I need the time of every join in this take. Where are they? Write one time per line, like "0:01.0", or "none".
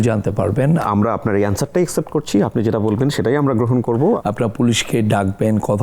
0:00.8
0:04.2